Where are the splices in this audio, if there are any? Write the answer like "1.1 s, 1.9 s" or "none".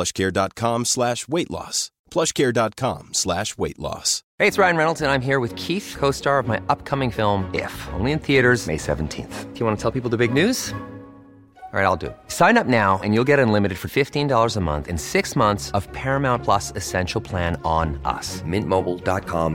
4.2 s